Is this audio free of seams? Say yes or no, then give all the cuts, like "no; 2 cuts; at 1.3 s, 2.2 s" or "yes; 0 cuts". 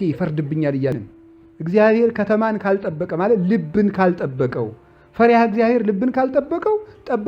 no; 1 cut; at 1.0 s